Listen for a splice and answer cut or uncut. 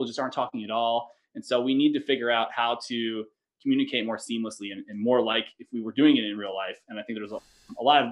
uncut